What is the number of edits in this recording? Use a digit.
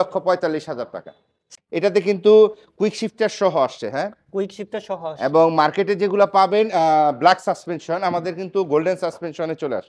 1